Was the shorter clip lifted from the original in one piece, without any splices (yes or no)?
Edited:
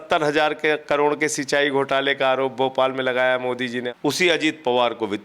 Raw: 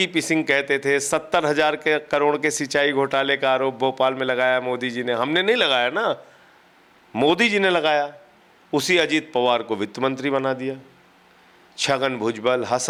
no